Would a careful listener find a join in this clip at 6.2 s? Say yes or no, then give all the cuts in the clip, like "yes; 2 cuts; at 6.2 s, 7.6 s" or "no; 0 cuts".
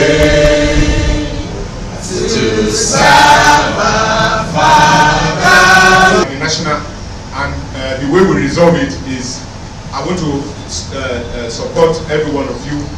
no; 0 cuts